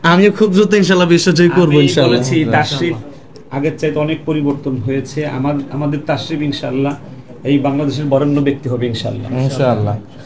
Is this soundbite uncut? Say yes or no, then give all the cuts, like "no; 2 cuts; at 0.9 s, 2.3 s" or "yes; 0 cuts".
yes; 0 cuts